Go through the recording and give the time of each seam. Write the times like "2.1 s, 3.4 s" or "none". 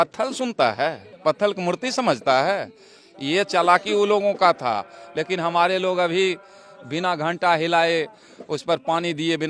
none